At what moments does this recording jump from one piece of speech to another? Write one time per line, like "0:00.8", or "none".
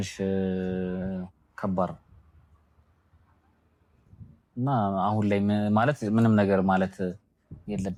none